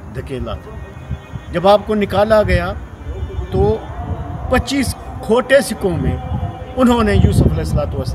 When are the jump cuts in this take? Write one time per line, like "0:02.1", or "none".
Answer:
0:00.9